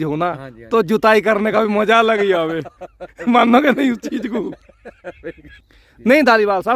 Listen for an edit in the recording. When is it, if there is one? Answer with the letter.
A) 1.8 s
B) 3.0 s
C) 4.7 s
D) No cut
D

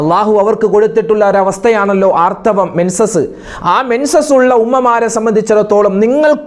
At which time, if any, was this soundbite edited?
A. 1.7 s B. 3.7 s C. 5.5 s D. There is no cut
D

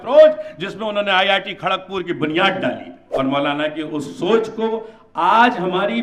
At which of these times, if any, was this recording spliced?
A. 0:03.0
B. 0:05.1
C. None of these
A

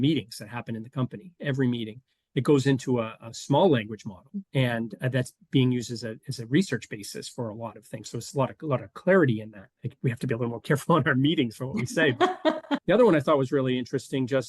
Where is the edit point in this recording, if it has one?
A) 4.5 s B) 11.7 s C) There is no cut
A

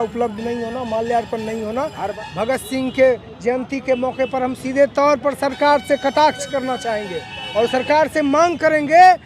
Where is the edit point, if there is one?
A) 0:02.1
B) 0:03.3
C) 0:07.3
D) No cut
A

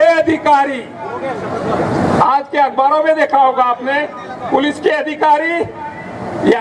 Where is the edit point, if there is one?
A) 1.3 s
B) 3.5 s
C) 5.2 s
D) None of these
D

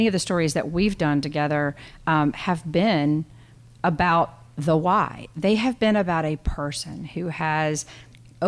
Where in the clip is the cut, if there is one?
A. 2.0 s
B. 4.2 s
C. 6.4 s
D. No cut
D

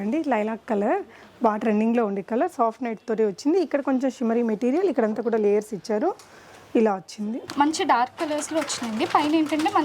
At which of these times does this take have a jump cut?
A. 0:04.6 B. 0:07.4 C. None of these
B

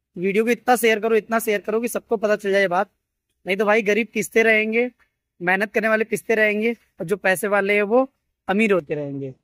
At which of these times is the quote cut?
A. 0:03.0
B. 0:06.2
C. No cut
C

